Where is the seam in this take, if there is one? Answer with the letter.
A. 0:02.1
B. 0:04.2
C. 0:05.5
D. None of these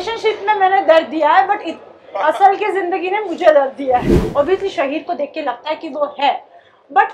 B